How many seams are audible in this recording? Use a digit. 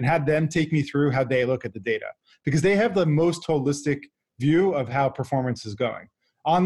0